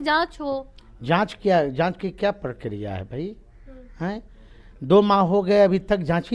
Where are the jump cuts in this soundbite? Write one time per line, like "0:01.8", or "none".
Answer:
none